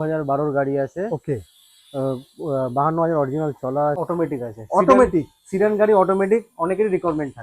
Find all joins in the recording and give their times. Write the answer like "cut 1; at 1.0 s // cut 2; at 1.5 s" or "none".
cut 1; at 4.0 s